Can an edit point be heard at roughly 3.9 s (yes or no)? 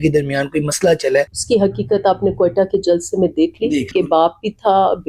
yes